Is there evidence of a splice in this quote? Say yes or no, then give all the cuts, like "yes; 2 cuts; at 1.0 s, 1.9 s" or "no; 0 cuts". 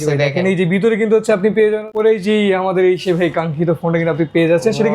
yes; 1 cut; at 1.9 s